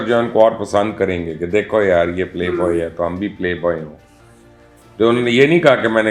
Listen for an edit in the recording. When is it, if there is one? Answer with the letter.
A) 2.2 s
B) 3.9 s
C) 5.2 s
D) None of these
D